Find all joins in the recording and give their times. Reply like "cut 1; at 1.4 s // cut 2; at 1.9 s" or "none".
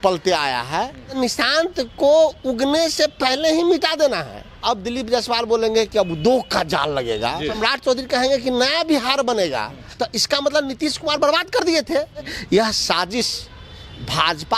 cut 1; at 1.2 s // cut 2; at 4.4 s // cut 3; at 7.6 s // cut 4; at 9.8 s // cut 5; at 12.4 s